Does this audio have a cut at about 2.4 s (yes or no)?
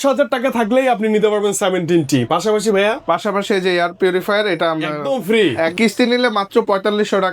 no